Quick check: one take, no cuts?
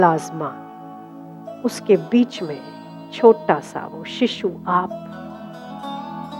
yes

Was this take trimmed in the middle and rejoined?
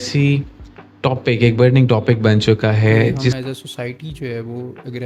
yes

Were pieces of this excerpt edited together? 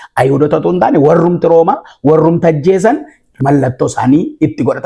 yes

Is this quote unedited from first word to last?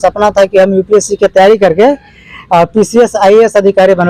yes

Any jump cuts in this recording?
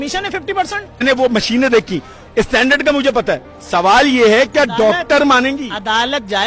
yes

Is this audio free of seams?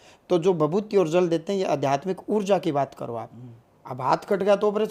yes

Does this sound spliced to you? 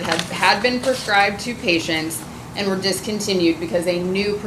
no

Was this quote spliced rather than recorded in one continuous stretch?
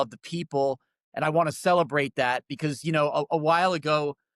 no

